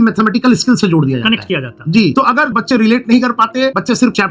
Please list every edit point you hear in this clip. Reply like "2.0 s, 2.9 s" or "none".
none

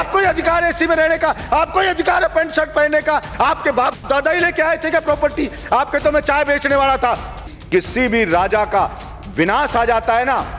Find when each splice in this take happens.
7.5 s

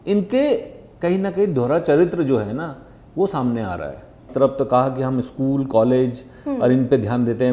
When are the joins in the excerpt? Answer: 4.3 s

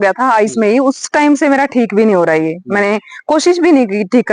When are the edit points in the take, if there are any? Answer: none

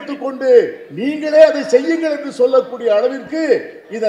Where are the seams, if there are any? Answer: none

